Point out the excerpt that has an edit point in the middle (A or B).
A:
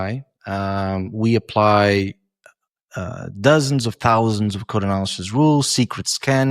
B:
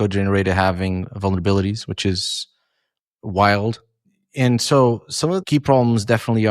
B